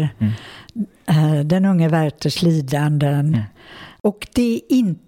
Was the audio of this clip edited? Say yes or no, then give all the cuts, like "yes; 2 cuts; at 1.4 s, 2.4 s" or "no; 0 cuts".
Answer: yes; 1 cut; at 3.9 s